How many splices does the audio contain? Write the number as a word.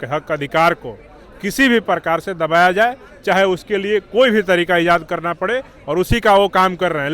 zero